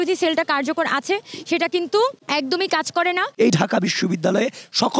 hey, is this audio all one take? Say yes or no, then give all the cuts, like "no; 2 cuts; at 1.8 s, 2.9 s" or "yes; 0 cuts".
no; 2 cuts; at 2.2 s, 3.3 s